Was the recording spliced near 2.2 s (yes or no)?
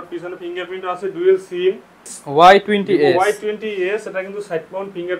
yes